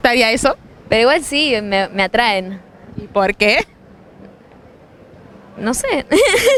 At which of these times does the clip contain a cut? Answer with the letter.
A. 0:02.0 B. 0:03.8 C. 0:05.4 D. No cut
D